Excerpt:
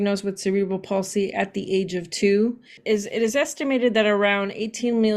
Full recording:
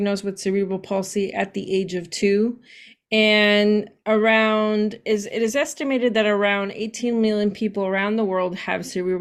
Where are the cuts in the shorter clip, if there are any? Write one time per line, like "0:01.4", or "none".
0:02.8